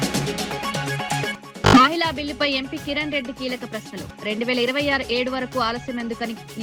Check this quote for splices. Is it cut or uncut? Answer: uncut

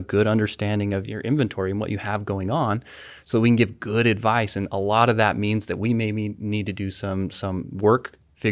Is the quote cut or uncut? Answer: cut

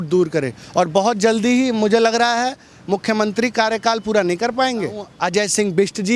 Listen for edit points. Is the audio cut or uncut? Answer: cut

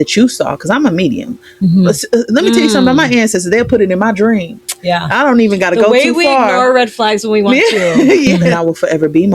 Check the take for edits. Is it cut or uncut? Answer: cut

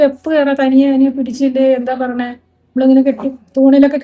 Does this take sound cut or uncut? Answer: uncut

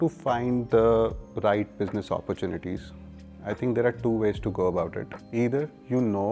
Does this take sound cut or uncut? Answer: uncut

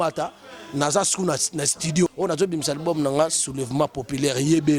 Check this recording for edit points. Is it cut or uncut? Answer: cut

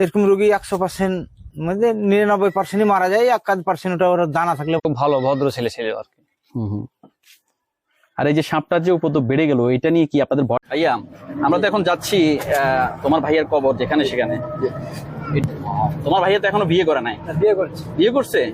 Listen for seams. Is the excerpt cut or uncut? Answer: cut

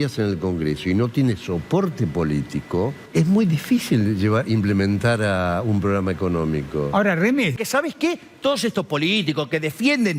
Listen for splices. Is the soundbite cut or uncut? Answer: cut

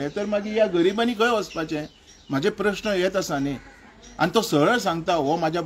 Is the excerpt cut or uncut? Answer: uncut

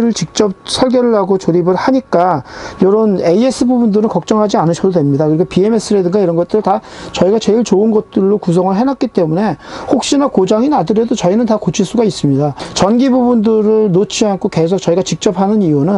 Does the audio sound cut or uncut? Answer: uncut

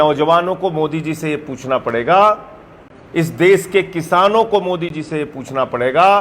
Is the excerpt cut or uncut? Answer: uncut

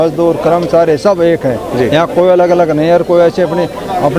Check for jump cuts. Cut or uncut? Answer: uncut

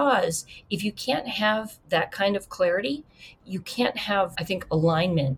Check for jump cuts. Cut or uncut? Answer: cut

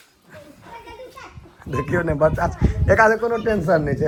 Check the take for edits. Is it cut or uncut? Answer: uncut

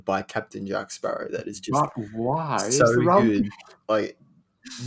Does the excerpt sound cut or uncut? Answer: uncut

